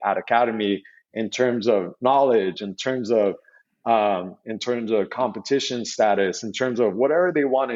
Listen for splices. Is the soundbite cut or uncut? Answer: uncut